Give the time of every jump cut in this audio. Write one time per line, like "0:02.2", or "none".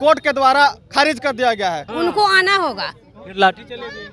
0:01.9